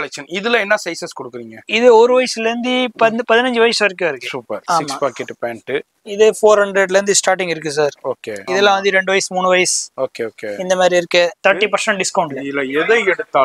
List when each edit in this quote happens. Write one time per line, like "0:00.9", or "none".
0:04.6
0:08.4
0:11.4